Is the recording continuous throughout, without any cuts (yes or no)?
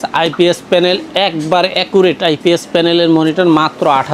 yes